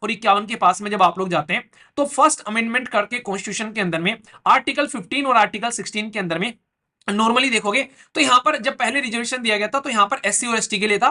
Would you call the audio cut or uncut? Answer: uncut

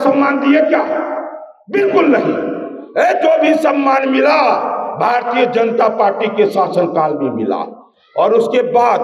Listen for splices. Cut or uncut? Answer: uncut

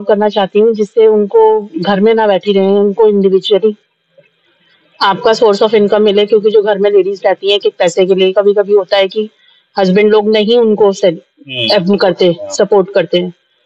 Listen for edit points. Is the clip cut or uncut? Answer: uncut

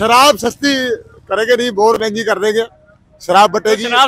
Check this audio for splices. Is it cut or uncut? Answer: uncut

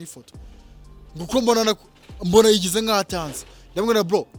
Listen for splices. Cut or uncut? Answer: uncut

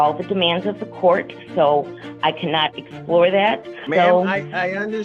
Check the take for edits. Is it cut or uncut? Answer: cut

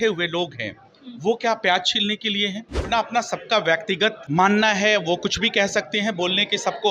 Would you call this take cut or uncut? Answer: cut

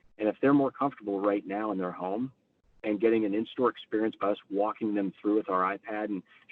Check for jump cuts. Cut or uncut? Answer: uncut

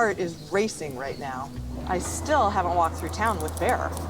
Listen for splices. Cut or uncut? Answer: uncut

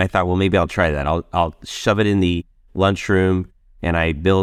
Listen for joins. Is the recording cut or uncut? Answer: uncut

